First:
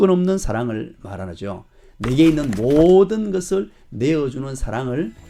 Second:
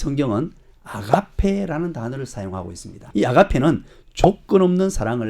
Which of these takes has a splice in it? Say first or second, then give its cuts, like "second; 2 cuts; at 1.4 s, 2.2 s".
second; 1 cut; at 3.1 s